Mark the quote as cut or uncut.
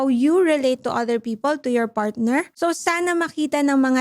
cut